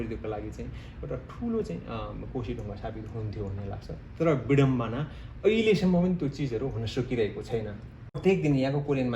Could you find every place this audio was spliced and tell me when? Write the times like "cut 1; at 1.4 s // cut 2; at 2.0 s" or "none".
cut 1; at 8.2 s